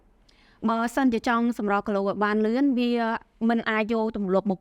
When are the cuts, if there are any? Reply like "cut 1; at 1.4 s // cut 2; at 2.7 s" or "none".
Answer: none